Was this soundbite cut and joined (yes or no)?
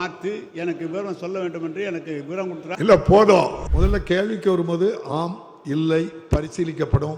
yes